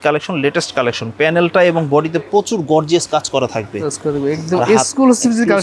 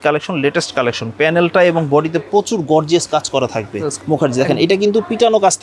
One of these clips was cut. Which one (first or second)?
second